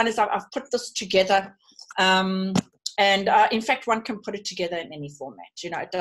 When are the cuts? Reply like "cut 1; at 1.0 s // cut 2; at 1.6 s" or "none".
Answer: none